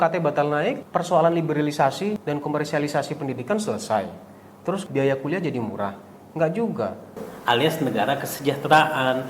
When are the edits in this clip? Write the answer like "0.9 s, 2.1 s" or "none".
0.8 s, 2.2 s, 4.8 s, 7.2 s